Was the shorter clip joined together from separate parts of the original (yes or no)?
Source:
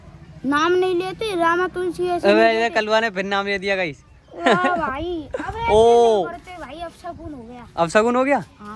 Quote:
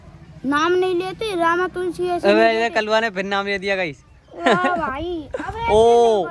no